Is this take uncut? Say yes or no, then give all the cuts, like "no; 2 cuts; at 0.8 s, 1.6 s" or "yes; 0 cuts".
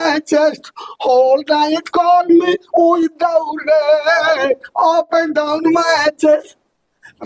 yes; 0 cuts